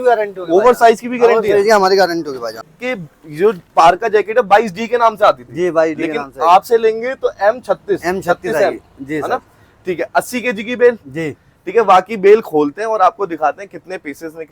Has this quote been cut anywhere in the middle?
yes; 1 cut; at 2.8 s

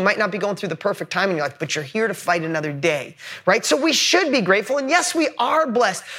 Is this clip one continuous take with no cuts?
yes; 0 cuts

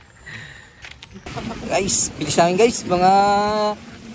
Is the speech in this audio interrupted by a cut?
yes; 1 cut; at 1.3 s

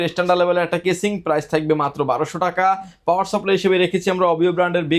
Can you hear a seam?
no; 0 cuts

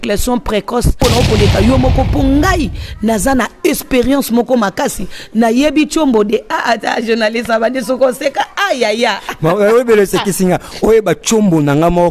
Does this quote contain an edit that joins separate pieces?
yes; 1 cut; at 1.0 s

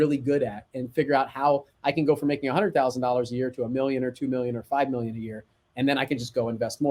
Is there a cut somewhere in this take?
no; 0 cuts

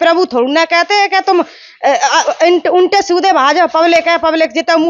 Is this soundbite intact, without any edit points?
yes; 0 cuts

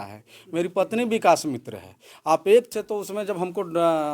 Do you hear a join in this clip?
yes; 1 cut; at 2.7 s

